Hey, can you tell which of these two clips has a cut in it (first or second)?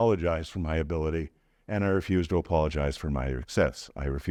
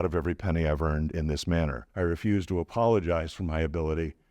second